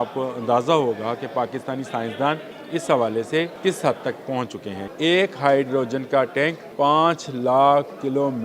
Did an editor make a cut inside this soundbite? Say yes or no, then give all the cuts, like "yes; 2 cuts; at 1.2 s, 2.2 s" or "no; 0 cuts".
yes; 4 cuts; at 2.5 s, 3.5 s, 4.8 s, 6.6 s